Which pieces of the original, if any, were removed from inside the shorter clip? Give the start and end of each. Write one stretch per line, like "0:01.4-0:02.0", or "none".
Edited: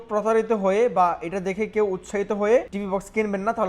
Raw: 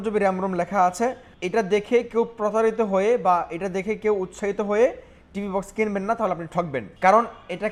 0:05.0-0:05.4